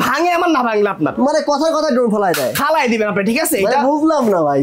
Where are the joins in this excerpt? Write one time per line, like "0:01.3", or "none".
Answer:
none